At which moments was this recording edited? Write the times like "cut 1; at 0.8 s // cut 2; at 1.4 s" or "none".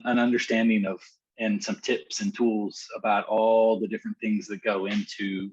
none